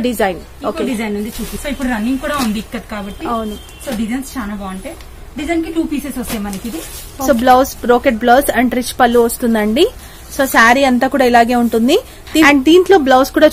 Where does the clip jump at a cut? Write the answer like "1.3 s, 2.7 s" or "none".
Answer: 1.5 s, 7.3 s, 12.5 s